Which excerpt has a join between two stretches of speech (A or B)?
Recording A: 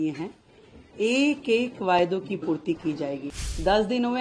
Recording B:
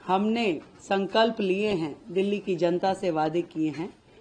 A